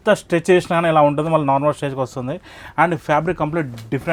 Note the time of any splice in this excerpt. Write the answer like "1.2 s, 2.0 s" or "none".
none